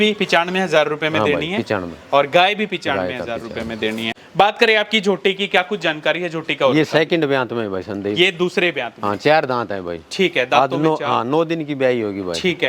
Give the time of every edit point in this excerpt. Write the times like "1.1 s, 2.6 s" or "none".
4.2 s